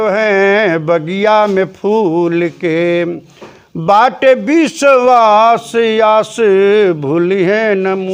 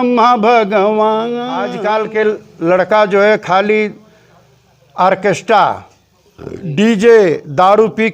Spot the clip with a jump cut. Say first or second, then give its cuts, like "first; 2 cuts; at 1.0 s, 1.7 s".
second; 1 cut; at 1.7 s